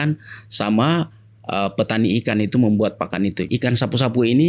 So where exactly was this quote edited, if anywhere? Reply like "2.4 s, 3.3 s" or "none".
3.4 s